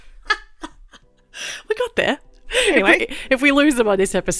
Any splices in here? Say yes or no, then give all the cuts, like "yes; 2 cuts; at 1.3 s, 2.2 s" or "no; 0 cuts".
yes; 1 cut; at 2.3 s